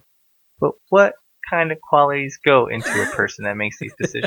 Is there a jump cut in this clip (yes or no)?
no